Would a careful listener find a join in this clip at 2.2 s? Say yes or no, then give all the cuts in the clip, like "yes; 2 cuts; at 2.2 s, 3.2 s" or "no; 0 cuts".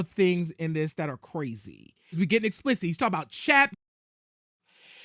yes; 1 cut; at 2.2 s